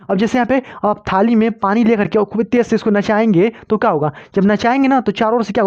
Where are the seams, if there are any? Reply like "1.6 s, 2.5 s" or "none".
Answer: none